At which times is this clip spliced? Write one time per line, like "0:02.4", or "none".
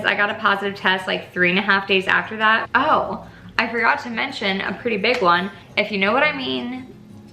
0:02.6
0:05.6